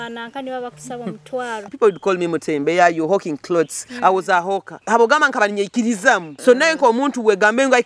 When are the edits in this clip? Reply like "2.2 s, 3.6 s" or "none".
1.6 s, 4.7 s, 6.3 s